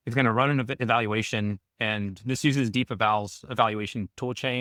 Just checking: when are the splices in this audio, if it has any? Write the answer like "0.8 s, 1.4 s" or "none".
none